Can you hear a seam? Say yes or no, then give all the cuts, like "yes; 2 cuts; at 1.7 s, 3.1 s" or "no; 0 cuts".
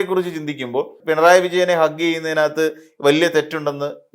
yes; 1 cut; at 1.0 s